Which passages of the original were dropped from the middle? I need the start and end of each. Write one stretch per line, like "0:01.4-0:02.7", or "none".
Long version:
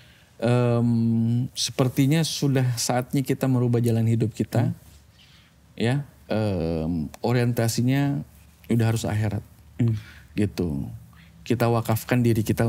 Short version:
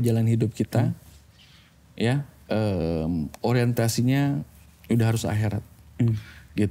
none